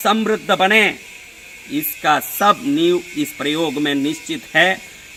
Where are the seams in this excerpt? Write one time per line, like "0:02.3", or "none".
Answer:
none